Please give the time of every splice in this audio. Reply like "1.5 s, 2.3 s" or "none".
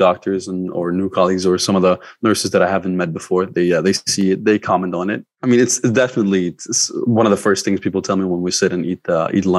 5.3 s